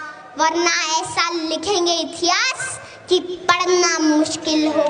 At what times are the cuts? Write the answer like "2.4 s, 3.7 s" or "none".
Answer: none